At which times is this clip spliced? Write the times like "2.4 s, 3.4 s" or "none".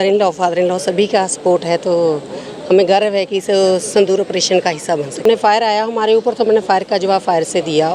5.2 s